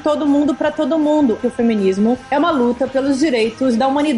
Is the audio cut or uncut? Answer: cut